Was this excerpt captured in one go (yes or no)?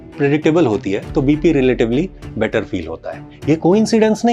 no